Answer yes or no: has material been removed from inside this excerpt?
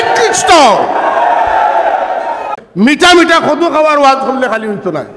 yes